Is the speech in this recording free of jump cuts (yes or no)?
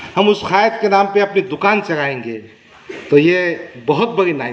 yes